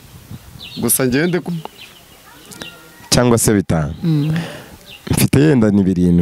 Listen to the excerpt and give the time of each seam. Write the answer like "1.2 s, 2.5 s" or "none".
1.4 s